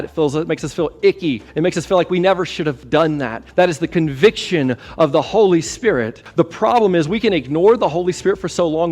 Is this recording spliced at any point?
yes; 3 cuts; at 1.5 s, 3.4 s, 6.2 s

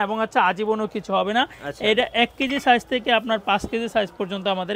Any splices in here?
no; 0 cuts

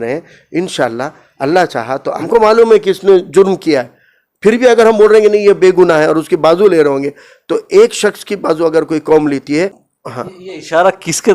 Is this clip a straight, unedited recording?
no; 2 cuts; at 2.1 s, 9.8 s

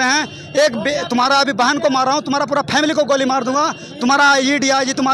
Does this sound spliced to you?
no; 0 cuts

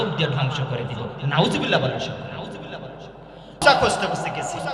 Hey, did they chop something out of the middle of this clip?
yes; 1 cut; at 3.6 s

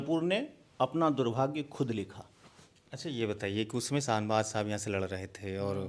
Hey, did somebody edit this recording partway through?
no; 0 cuts

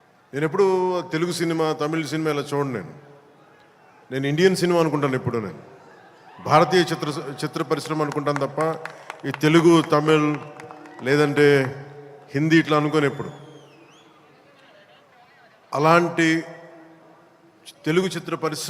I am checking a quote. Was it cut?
yes; 1 cut; at 7.4 s

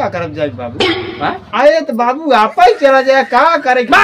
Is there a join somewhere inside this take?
yes; 1 cut; at 1.4 s

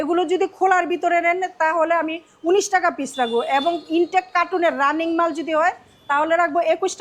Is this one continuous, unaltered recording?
yes; 0 cuts

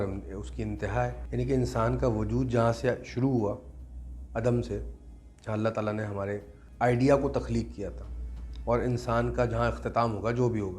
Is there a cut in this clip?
yes; 2 cuts; at 1.2 s, 6.6 s

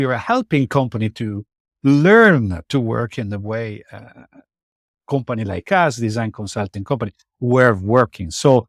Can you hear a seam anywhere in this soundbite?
no; 0 cuts

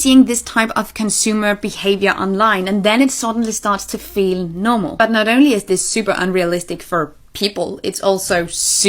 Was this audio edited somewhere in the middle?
no; 0 cuts

